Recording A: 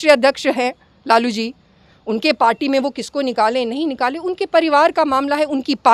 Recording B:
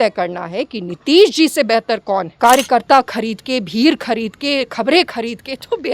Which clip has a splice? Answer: B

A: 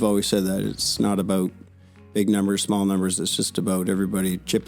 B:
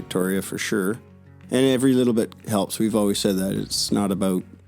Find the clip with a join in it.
B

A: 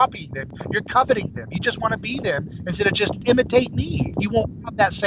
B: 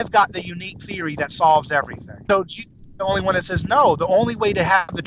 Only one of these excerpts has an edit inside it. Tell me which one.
B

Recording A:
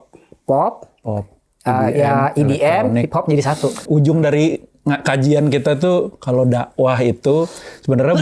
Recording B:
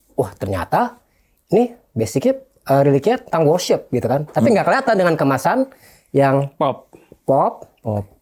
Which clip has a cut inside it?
A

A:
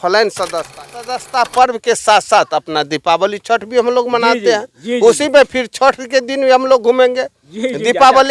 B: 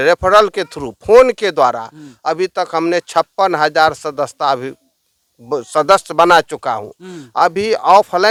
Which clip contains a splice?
A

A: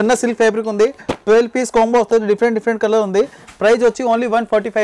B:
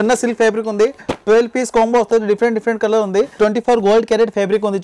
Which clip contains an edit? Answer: B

